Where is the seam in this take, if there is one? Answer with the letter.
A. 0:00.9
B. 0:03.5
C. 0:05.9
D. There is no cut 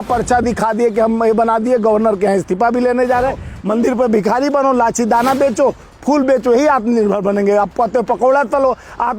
B